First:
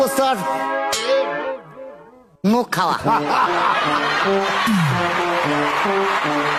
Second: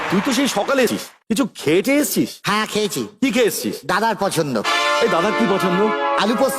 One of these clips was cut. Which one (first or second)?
second